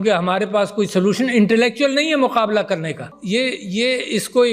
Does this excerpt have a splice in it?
yes; 1 cut; at 3.1 s

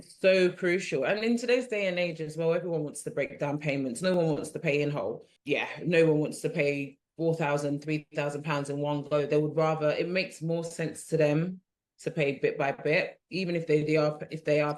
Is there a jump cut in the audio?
yes; 2 cuts; at 5.3 s, 7.0 s

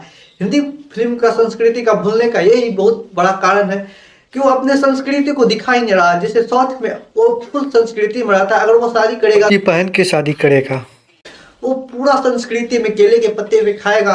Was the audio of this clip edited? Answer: no; 0 cuts

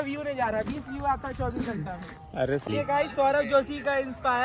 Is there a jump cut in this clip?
yes; 1 cut; at 2.7 s

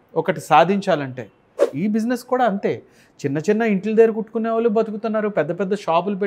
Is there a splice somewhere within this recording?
yes; 1 cut; at 1.6 s

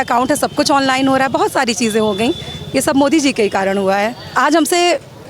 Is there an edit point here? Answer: yes; 1 cut; at 4.3 s

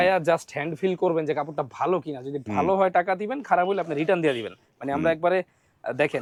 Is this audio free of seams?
yes; 0 cuts

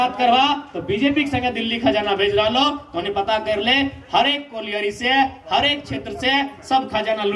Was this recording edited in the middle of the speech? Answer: no; 0 cuts

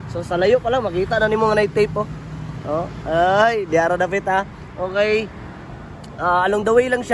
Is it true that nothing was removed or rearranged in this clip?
yes; 0 cuts

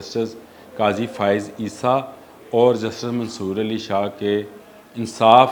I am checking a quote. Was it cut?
no; 0 cuts

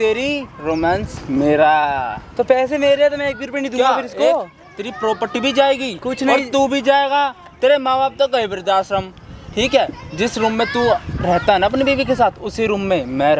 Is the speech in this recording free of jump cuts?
yes; 0 cuts

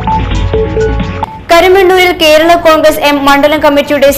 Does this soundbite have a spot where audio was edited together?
no; 0 cuts

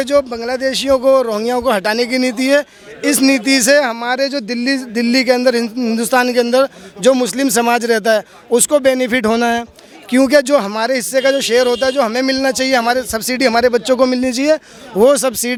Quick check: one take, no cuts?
yes; 0 cuts

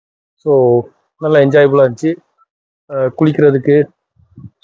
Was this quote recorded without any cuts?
yes; 0 cuts

